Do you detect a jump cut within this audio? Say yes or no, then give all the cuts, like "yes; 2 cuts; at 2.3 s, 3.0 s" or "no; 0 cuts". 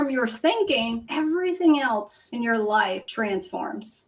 yes; 3 cuts; at 1.0 s, 2.2 s, 3.1 s